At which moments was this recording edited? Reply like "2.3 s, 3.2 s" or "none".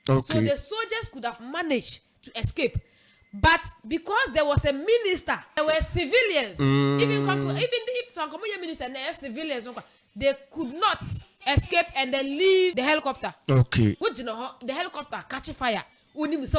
5.6 s, 12.7 s, 14.0 s